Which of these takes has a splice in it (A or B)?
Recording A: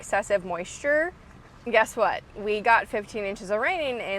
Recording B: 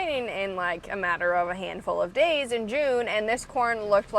A